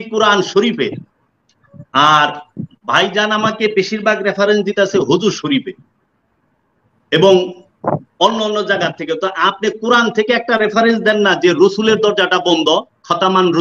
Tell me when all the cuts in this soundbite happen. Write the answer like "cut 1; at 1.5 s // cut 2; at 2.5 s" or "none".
none